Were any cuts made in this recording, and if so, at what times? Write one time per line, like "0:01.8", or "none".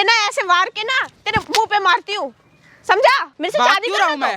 0:03.3